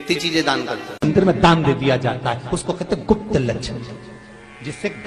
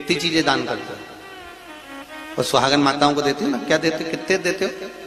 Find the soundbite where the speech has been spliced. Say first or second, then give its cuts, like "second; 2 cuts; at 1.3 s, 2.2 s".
first; 1 cut; at 1.1 s